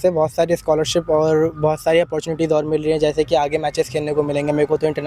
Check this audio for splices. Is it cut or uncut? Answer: uncut